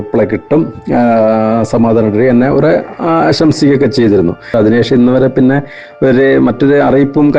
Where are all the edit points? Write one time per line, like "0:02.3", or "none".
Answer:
0:04.5